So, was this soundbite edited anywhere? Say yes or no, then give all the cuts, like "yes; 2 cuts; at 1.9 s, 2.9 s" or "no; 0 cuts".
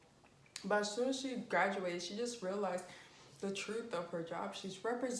no; 0 cuts